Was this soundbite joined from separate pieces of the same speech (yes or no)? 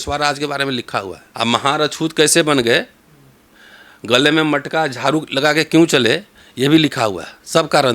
yes